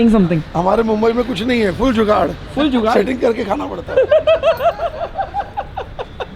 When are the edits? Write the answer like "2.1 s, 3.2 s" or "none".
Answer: none

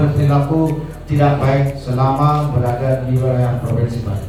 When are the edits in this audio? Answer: none

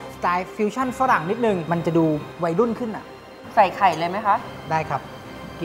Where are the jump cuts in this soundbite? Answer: 1.6 s, 3.4 s

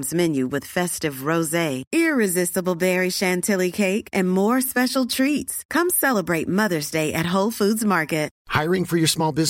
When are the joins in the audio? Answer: 8.3 s

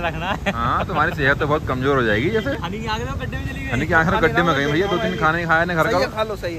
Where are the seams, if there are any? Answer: none

